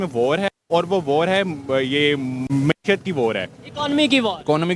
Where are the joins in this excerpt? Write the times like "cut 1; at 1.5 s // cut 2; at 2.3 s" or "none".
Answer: cut 1; at 2.4 s